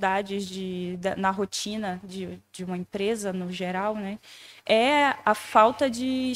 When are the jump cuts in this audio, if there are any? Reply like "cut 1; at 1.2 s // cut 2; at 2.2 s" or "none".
none